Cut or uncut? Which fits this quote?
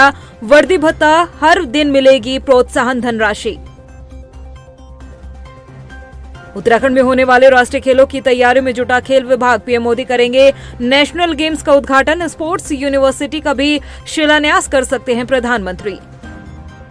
uncut